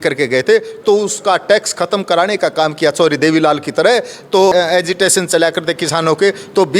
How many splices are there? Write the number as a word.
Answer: one